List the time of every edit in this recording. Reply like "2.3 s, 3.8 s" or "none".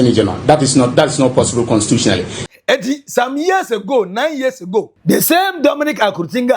2.5 s, 4.9 s